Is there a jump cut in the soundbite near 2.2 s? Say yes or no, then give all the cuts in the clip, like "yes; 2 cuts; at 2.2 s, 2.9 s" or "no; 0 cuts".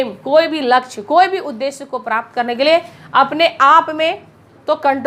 no; 0 cuts